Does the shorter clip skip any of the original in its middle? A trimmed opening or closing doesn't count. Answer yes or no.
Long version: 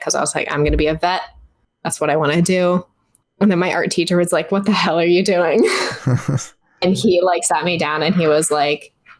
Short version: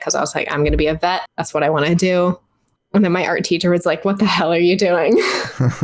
yes